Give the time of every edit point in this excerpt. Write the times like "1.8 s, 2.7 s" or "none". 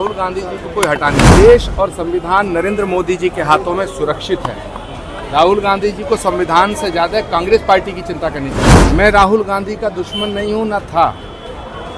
1.4 s, 8.7 s